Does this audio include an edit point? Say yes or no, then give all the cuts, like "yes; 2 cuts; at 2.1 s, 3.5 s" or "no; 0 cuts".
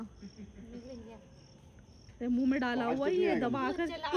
no; 0 cuts